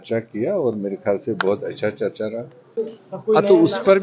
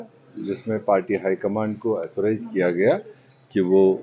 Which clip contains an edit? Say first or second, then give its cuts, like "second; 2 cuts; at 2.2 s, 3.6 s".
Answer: first; 1 cut; at 2.8 s